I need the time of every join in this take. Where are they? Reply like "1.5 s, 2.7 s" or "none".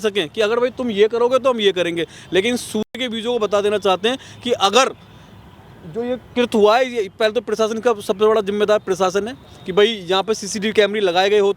none